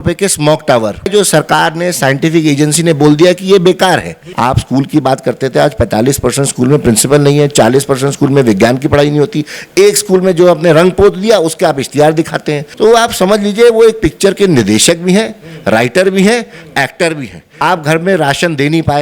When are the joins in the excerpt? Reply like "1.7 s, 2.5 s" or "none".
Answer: 1.1 s, 4.3 s, 12.6 s, 17.4 s